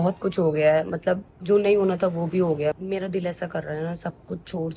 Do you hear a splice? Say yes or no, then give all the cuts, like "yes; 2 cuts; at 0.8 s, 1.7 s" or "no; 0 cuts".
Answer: no; 0 cuts